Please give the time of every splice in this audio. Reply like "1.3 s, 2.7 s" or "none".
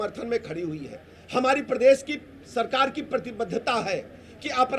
none